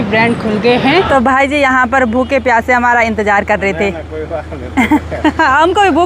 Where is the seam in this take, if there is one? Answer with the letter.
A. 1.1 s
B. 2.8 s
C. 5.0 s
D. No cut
A